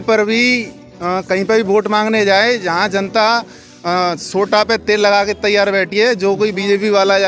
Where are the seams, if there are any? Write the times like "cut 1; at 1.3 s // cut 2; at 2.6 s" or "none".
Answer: none

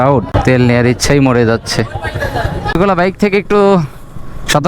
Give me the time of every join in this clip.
cut 1; at 2.7 s

